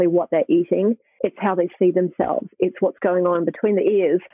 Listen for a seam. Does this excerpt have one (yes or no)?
yes